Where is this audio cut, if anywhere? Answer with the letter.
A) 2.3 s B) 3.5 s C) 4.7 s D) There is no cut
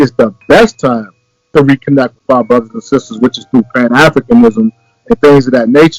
D